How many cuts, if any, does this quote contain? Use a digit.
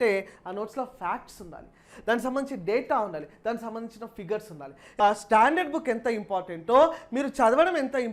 1